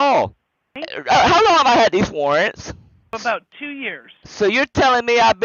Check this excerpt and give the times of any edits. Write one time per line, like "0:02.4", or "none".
0:00.9
0:03.1